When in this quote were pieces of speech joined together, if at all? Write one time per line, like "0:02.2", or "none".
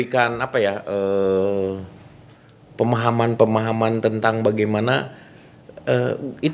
none